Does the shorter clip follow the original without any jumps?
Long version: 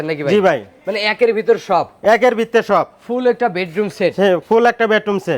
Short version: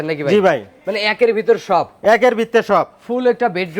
yes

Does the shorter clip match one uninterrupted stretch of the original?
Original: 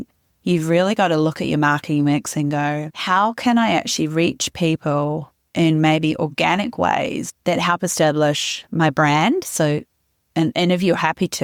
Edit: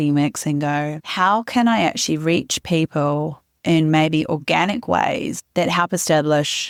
yes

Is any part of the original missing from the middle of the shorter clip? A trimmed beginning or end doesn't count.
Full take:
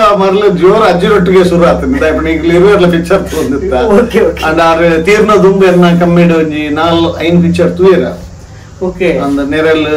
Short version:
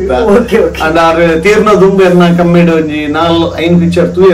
no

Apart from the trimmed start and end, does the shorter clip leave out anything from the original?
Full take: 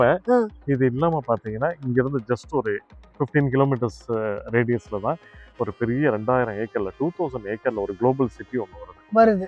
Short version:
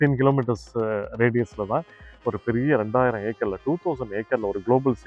no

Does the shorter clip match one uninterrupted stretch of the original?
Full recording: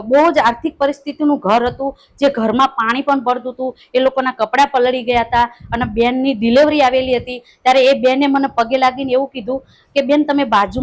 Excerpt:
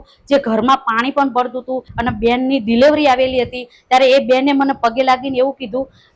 no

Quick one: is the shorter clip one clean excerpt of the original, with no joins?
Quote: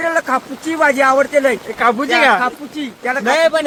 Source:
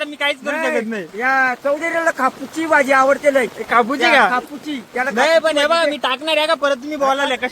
yes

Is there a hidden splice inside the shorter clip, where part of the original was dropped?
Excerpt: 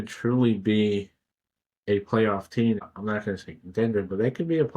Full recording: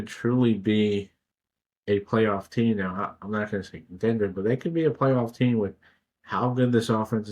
yes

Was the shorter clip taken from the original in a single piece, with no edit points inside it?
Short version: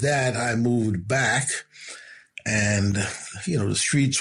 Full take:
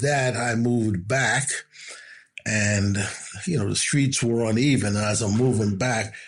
yes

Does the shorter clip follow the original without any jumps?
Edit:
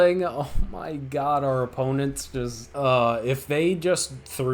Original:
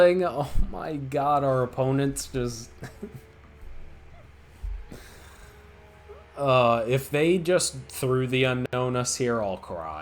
no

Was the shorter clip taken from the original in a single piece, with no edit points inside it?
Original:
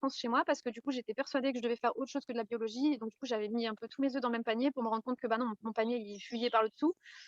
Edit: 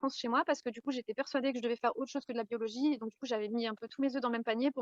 yes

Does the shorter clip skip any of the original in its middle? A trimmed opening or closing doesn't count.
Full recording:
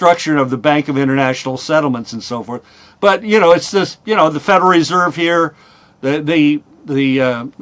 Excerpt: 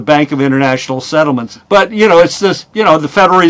yes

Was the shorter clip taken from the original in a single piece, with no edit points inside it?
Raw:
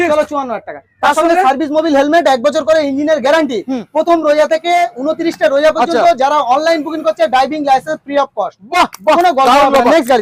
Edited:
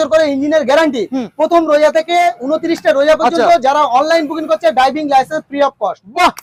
yes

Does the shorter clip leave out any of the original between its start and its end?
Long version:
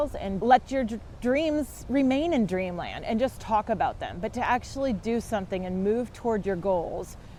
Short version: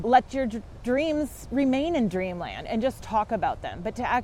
no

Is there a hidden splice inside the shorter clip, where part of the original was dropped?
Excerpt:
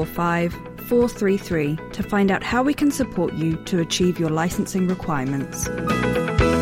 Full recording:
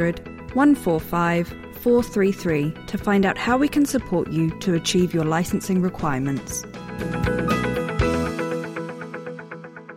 yes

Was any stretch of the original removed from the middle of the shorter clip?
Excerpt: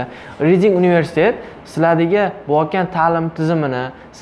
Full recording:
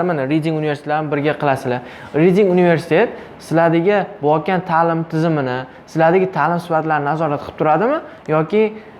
no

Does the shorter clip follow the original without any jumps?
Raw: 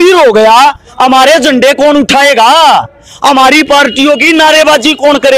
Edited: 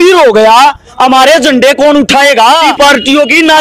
no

